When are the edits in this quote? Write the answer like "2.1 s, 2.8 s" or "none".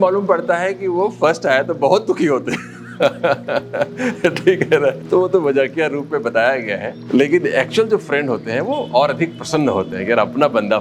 5.0 s, 6.9 s